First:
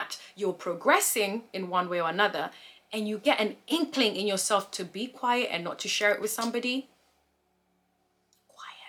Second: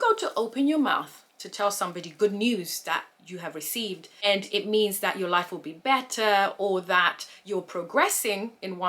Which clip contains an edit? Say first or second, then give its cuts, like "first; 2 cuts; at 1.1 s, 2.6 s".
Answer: second; 1 cut; at 4.0 s